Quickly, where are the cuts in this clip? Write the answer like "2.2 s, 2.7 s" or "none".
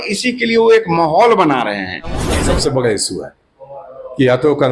2.4 s